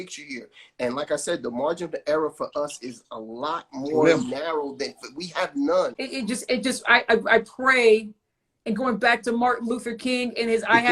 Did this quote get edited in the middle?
yes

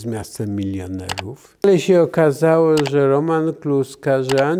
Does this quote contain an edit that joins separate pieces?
yes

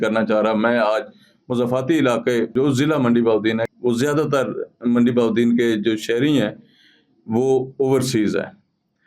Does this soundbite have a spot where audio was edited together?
yes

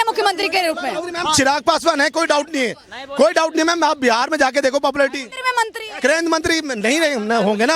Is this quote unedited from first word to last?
yes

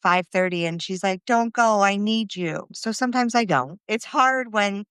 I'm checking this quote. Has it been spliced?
yes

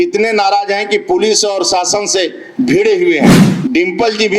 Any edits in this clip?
yes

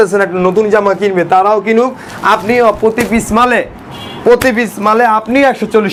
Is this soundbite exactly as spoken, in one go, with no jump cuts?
yes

